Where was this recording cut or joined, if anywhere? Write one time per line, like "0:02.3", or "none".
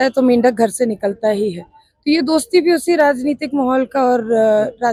none